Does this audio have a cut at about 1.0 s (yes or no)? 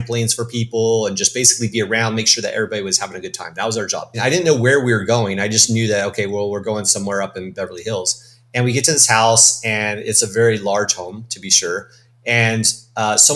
no